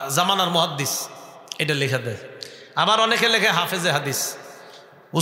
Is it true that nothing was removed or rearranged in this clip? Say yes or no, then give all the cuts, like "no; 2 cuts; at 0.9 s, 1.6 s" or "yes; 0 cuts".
yes; 0 cuts